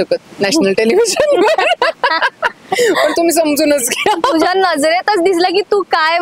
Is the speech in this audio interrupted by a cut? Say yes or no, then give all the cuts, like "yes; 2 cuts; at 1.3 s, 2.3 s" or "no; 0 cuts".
no; 0 cuts